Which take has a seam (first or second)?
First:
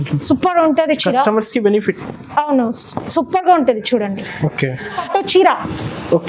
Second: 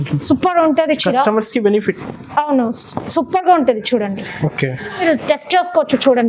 second